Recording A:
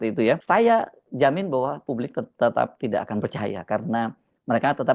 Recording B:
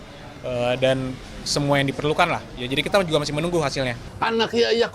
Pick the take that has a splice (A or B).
B